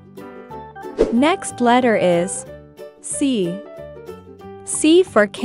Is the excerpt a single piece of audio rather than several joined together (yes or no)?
no